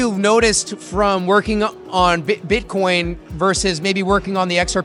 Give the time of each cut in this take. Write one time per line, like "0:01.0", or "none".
none